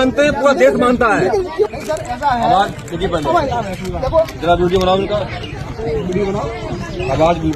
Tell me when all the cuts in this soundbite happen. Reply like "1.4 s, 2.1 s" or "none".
1.6 s